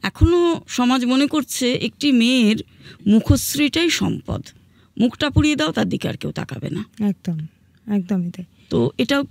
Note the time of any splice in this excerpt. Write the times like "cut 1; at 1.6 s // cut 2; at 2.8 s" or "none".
none